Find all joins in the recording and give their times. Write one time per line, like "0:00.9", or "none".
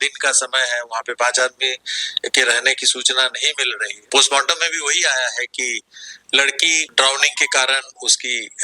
0:04.0
0:06.8